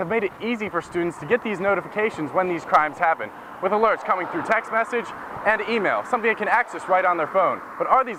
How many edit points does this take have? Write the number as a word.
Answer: zero